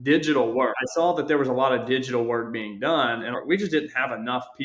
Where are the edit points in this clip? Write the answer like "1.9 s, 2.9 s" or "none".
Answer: 0.8 s, 3.3 s